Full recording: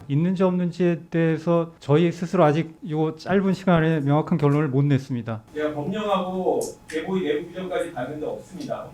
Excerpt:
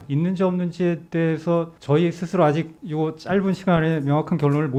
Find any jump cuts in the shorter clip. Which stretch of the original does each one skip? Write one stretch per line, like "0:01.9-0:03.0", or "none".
none